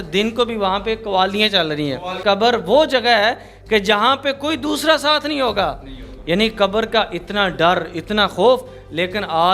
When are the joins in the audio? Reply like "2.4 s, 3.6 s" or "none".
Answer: 2.2 s